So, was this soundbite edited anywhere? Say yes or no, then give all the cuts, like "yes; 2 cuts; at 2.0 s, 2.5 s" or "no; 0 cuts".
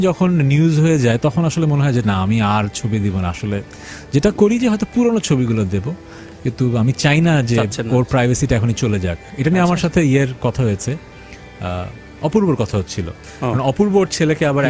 no; 0 cuts